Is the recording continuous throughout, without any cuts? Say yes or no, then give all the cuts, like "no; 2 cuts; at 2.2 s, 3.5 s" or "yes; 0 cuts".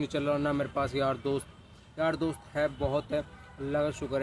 yes; 0 cuts